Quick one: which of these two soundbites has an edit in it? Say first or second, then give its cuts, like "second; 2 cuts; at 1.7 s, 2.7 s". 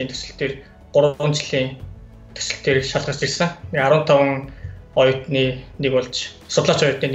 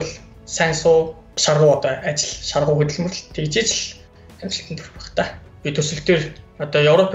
second; 2 cuts; at 1.2 s, 5.5 s